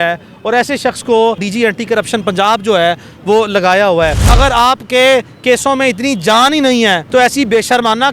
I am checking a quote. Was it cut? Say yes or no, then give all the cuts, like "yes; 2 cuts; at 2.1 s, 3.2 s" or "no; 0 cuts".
yes; 3 cuts; at 1.5 s, 4.2 s, 7.0 s